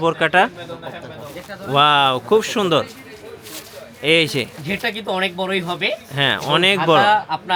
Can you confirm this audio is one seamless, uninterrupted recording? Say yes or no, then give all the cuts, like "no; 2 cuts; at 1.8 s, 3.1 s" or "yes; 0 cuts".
yes; 0 cuts